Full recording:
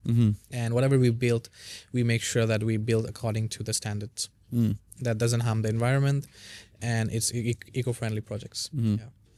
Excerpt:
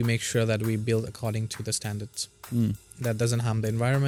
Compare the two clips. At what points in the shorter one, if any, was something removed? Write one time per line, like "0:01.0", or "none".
none